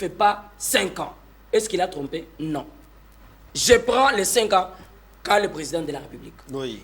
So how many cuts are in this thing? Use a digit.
0